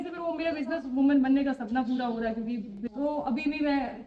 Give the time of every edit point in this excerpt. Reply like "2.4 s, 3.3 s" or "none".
2.7 s